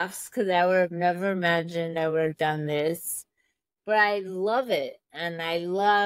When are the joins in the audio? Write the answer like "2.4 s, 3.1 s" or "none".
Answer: none